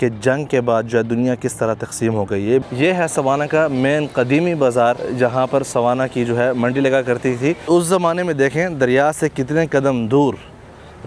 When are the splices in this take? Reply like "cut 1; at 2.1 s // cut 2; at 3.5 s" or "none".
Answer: cut 1; at 2.6 s // cut 2; at 5.0 s // cut 3; at 7.6 s